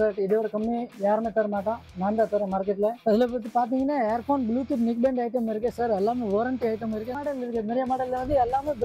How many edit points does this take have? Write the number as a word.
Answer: two